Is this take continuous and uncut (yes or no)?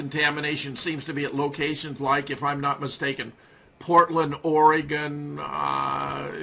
yes